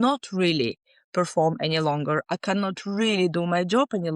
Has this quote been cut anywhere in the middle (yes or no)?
no